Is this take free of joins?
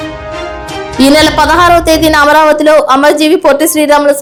yes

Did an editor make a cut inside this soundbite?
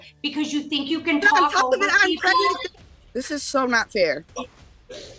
yes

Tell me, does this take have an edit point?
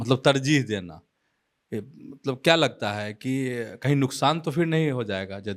no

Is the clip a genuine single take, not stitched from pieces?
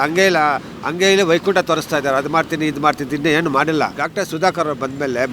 no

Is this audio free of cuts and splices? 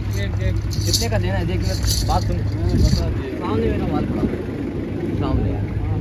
yes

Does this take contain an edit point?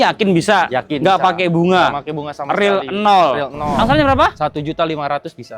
yes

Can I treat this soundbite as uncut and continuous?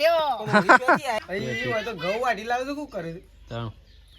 no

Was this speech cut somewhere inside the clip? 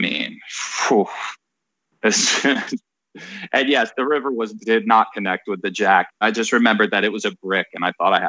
yes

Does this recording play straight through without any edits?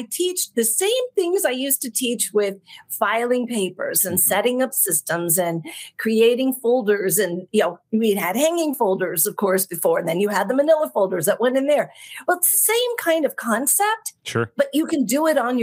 yes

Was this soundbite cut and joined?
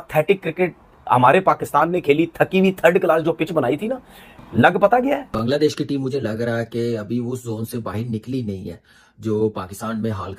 yes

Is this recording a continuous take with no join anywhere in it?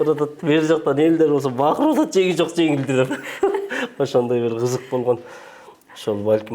yes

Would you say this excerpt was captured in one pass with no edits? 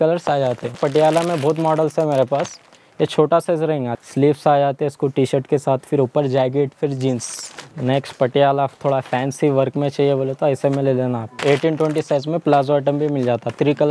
no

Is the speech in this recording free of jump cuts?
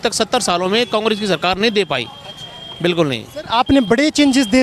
yes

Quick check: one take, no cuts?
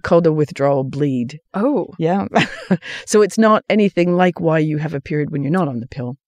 yes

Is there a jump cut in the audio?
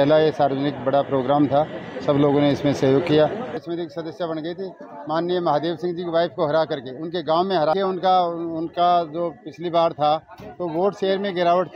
yes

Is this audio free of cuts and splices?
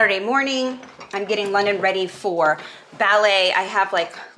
yes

